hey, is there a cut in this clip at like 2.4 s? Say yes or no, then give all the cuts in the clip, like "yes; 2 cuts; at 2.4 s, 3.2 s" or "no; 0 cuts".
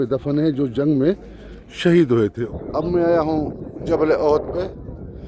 yes; 1 cut; at 2.4 s